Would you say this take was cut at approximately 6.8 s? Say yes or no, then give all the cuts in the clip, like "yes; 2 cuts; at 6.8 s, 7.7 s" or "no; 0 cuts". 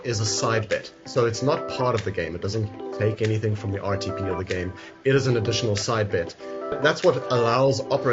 yes; 1 cut; at 6.8 s